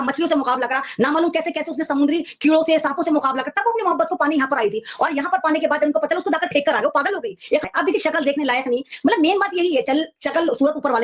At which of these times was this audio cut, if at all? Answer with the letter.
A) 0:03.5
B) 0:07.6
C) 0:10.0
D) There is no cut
B